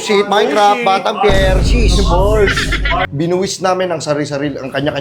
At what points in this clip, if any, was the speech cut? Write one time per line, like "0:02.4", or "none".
0:03.1